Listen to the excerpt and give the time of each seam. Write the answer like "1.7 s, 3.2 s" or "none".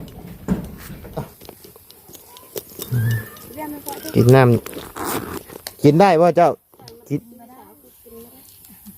1.3 s